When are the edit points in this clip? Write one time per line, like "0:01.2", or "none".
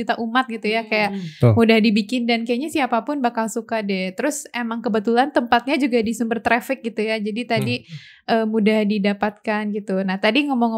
none